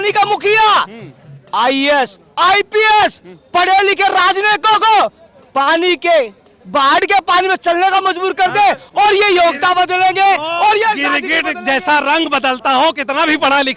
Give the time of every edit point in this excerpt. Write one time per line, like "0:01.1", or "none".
none